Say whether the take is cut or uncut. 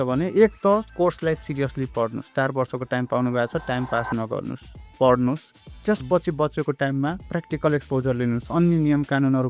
uncut